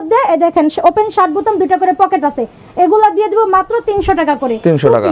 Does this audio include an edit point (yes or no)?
no